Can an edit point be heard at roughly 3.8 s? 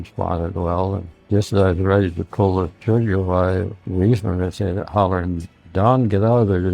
yes; 2 cuts; at 1.1 s, 3.8 s

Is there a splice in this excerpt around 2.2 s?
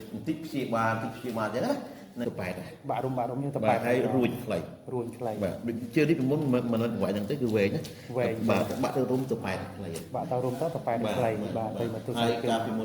yes; 1 cut; at 2.2 s

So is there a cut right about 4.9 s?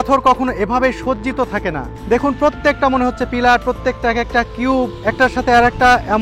yes; 2 cuts; at 1.9 s, 4.9 s

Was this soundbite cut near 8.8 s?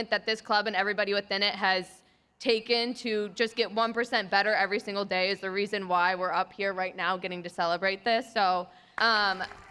yes; 1 cut; at 8.8 s

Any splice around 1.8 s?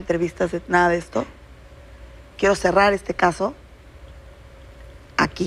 no; 0 cuts

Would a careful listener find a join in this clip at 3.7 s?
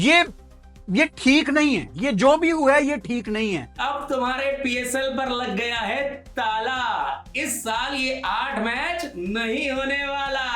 yes; 1 cut; at 3.7 s

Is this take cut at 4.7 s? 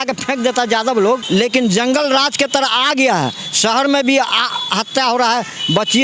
no; 1 cut; at 1.2 s

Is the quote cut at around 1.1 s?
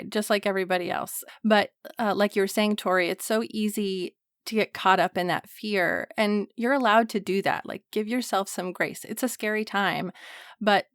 yes; 1 cut; at 1.1 s

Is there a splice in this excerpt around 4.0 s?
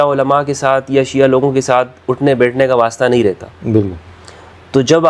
no; 0 cuts

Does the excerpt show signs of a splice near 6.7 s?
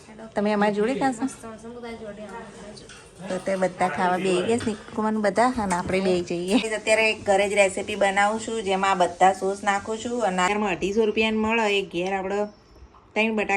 yes; 2 cuts; at 6.7 s, 10.5 s

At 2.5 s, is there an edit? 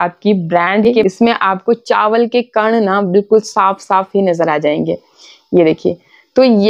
no; 1 cut; at 1.0 s

